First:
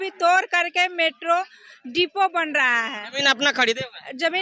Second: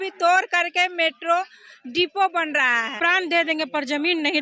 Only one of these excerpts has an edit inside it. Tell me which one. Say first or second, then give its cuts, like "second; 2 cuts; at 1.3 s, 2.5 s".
second; 1 cut; at 3.0 s